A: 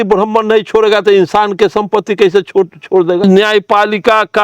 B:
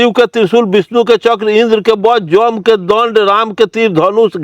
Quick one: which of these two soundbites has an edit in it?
A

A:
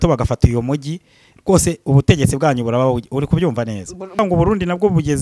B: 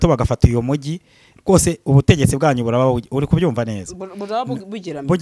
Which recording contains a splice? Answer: A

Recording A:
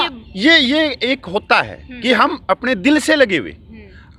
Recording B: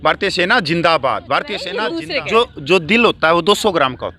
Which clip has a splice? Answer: B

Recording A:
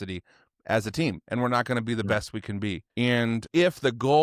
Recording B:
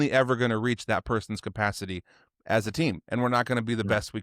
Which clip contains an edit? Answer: A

